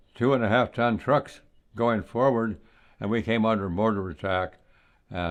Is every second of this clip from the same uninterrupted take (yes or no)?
yes